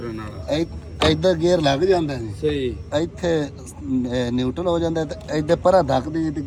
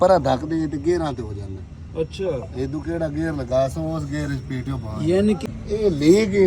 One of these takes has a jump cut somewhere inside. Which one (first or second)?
second